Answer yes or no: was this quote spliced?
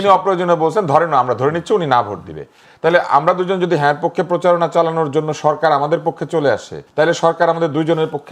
yes